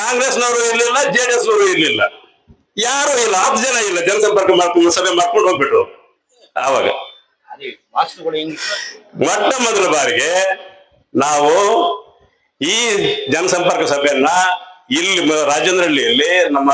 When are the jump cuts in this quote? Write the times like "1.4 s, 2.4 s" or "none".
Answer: 8.6 s